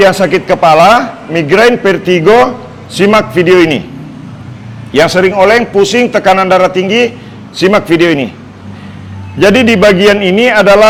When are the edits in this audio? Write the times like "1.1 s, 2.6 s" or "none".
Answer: none